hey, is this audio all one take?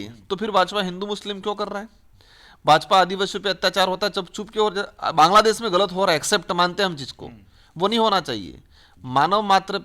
yes; 0 cuts

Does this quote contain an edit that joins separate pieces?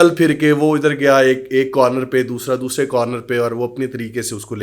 no; 0 cuts

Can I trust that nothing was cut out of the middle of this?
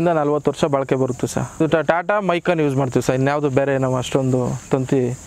no; 1 cut; at 1.6 s

